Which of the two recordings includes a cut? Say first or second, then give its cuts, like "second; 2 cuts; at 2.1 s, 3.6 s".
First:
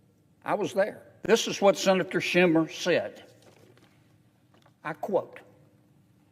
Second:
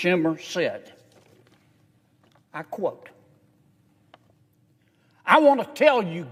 first; 1 cut; at 1.1 s